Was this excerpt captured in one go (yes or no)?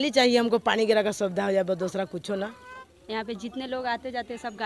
no